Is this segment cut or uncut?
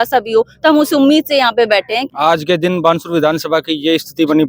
cut